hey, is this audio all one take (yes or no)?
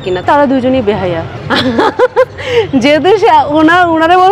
no